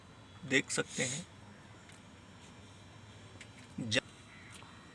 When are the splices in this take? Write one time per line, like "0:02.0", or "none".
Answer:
0:04.0